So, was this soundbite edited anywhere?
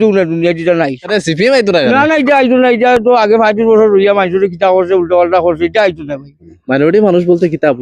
yes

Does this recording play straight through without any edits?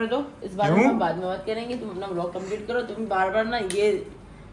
yes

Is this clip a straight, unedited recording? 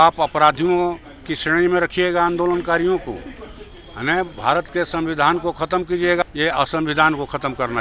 no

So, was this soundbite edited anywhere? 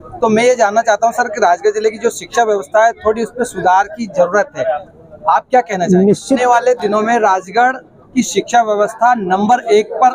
yes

